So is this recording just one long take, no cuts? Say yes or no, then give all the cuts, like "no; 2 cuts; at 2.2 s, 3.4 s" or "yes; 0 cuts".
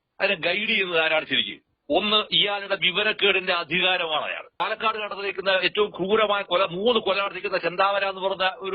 no; 1 cut; at 4.6 s